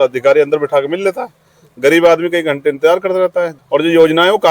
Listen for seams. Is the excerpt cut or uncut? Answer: cut